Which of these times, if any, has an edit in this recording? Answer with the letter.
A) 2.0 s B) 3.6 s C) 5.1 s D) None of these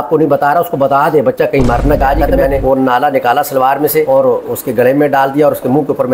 A